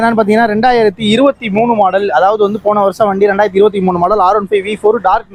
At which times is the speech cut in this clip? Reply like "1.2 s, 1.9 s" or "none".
none